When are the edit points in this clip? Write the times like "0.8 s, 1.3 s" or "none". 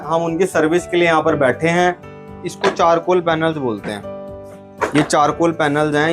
2.2 s